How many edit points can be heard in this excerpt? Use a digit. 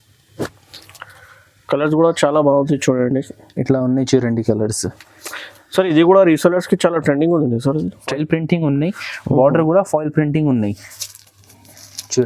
1